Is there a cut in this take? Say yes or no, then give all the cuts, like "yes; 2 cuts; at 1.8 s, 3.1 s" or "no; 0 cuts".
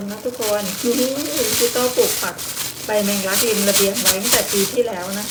no; 0 cuts